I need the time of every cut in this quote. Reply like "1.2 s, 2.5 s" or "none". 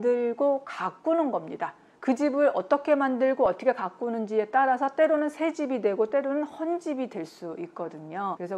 none